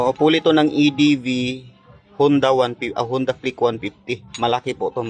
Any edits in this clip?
no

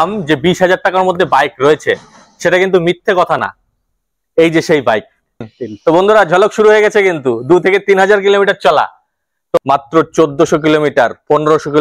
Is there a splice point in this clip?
yes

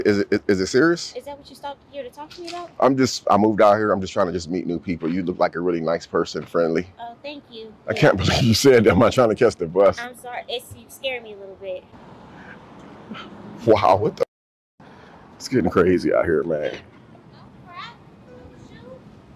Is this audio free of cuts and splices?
no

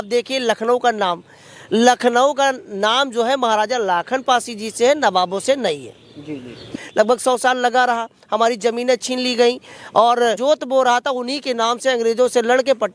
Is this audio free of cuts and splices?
no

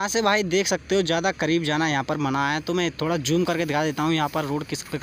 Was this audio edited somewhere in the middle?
no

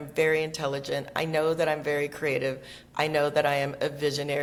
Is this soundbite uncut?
yes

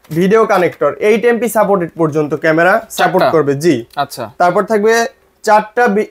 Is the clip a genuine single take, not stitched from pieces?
yes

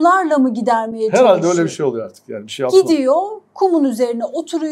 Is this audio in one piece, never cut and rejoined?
yes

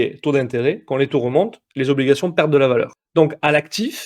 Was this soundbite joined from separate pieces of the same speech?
yes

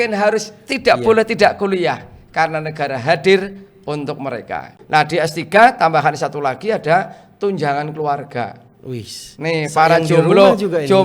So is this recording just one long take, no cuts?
no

